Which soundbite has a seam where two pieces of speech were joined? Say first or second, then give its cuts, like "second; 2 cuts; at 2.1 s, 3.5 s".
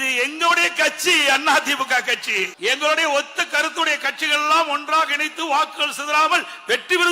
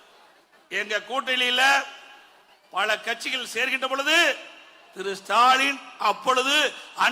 first; 1 cut; at 2.5 s